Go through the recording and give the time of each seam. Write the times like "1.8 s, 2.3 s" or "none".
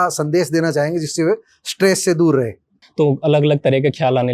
2.8 s